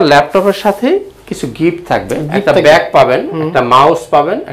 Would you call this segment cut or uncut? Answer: uncut